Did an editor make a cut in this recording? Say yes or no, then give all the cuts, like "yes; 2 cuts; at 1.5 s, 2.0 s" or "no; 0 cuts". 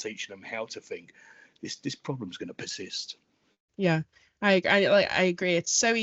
no; 0 cuts